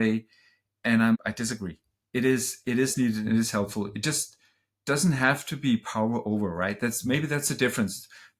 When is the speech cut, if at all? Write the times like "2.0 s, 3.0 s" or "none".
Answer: 1.2 s